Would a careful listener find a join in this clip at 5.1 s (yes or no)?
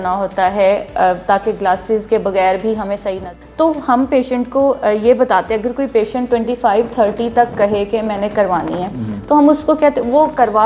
no